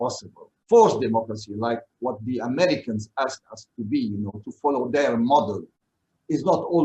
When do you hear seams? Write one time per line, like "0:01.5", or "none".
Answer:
none